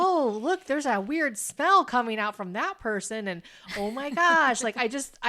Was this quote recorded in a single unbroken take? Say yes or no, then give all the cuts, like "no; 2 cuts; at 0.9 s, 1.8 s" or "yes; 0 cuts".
yes; 0 cuts